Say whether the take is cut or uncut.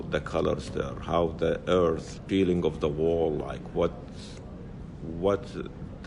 uncut